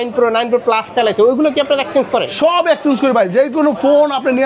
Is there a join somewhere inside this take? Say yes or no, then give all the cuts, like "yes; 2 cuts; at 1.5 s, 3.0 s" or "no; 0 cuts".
no; 0 cuts